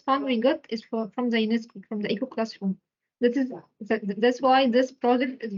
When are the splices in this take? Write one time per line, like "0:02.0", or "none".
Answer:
none